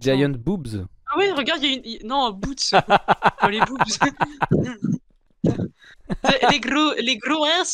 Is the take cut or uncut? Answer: uncut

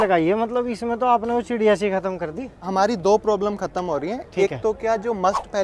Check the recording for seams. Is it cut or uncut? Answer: uncut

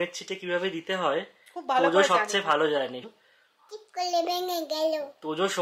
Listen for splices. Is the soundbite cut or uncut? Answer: cut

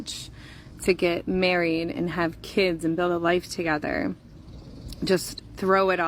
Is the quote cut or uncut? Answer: uncut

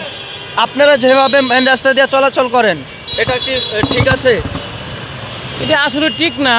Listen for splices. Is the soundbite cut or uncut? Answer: uncut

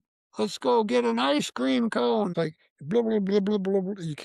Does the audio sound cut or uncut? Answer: cut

